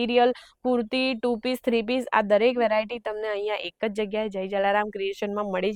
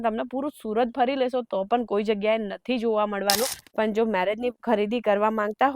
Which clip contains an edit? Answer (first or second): second